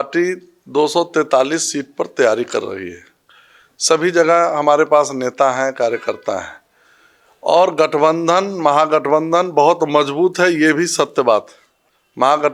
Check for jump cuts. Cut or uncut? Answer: uncut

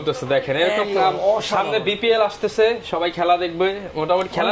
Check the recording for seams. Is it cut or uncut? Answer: uncut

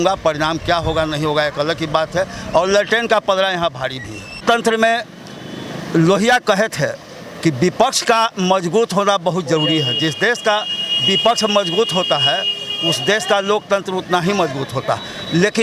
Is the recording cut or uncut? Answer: cut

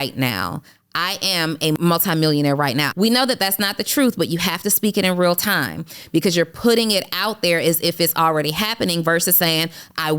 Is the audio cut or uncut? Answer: cut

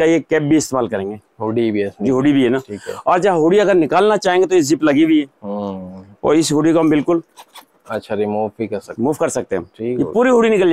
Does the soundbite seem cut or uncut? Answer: uncut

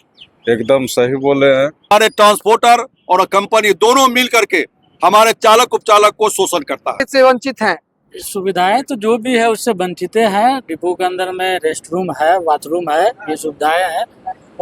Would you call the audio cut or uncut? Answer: cut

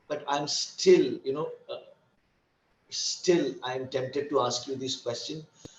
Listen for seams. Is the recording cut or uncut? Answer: uncut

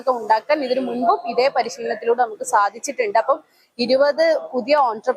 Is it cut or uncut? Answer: uncut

